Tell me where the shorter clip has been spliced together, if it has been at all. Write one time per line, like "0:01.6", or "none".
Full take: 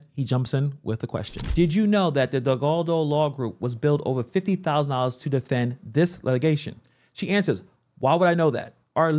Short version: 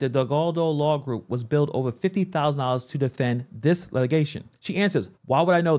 0:04.9